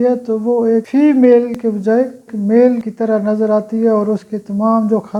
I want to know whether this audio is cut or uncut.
uncut